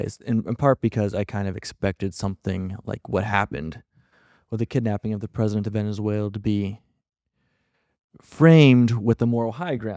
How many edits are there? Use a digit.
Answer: 0